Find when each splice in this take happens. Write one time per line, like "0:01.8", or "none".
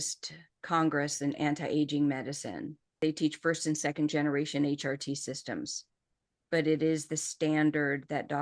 0:02.8